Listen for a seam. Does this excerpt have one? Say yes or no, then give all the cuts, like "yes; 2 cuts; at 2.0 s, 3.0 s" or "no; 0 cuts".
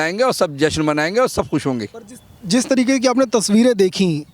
no; 0 cuts